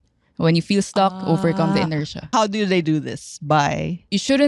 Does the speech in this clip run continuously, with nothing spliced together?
yes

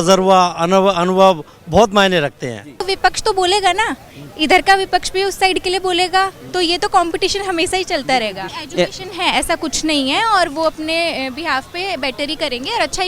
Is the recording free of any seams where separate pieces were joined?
no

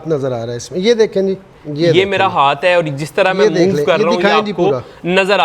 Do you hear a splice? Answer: yes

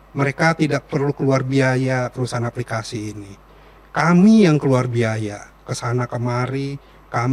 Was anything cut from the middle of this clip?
no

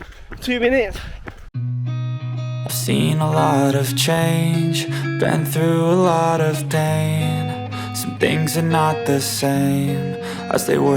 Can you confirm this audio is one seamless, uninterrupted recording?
no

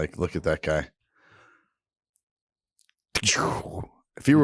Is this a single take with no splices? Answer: yes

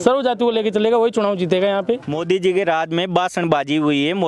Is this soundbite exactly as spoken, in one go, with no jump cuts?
no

